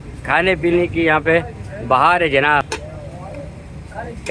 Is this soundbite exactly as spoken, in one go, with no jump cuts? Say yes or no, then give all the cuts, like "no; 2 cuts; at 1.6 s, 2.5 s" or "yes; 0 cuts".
no; 1 cut; at 2.7 s